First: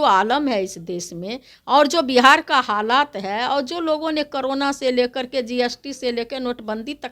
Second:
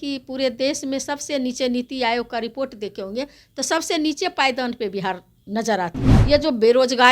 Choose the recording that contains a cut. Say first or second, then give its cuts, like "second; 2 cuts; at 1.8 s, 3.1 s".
second; 1 cut; at 6.1 s